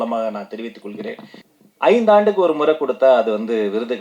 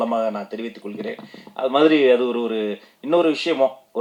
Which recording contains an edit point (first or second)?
first